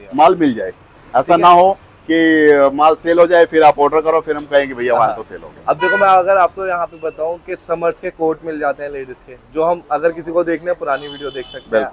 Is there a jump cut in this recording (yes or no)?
no